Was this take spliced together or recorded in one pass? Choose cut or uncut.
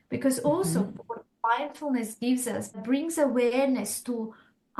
cut